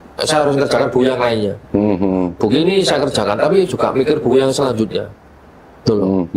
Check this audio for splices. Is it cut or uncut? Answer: uncut